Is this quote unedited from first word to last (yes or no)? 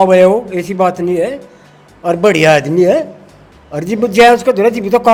yes